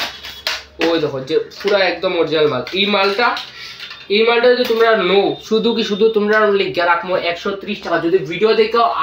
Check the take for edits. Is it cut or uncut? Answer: uncut